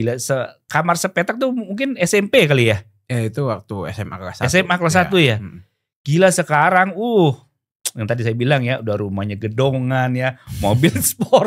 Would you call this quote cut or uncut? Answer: uncut